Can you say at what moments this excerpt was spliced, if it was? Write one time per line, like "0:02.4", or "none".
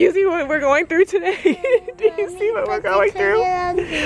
none